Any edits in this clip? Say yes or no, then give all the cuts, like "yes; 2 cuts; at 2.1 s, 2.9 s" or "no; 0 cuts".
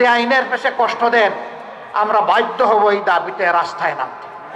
no; 0 cuts